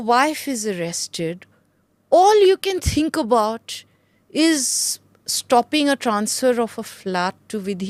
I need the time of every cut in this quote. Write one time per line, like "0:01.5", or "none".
none